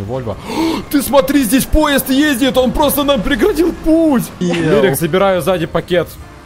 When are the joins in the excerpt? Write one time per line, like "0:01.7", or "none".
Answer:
0:04.4